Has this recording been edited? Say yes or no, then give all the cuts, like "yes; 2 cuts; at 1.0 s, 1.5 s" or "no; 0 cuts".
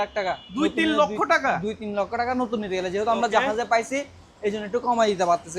no; 0 cuts